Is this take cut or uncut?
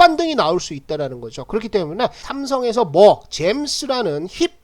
cut